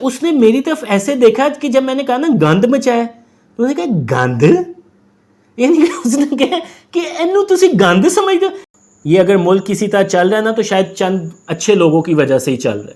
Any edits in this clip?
yes; 1 cut; at 8.7 s

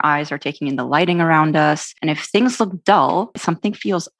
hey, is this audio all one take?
no; 2 cuts; at 1.9 s, 3.4 s

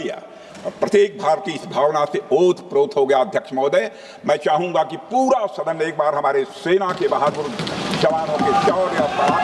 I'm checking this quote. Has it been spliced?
no; 0 cuts

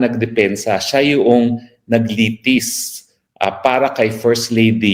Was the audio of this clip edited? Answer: no; 0 cuts

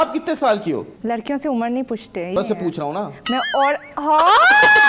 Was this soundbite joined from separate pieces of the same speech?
yes; 1 cut; at 2.4 s

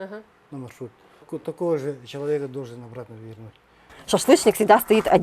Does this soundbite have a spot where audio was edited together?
yes; 2 cuts; at 1.3 s, 4.0 s

